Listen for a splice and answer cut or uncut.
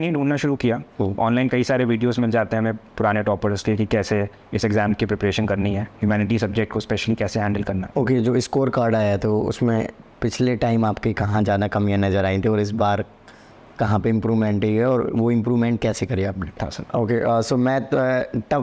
cut